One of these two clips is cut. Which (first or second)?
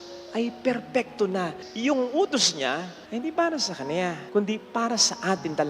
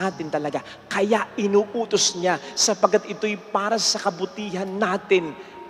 first